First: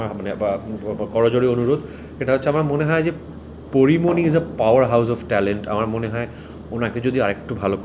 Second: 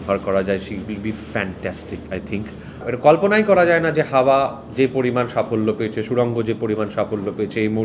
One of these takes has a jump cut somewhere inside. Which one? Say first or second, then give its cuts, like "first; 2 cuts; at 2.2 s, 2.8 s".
second; 1 cut; at 2.8 s